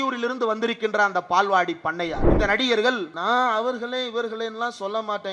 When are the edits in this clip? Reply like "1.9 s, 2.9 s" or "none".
2.3 s, 3.1 s